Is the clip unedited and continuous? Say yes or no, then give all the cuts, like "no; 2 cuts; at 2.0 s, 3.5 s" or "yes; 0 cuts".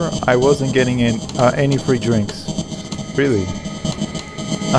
yes; 0 cuts